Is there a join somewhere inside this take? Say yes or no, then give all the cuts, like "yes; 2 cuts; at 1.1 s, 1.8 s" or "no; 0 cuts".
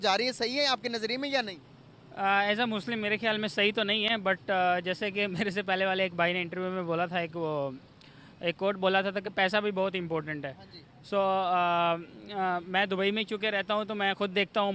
no; 0 cuts